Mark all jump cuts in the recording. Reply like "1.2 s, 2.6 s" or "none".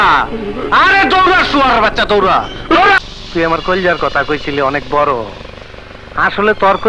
3.0 s